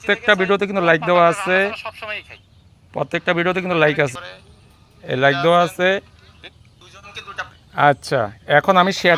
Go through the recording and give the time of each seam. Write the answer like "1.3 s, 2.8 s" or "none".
none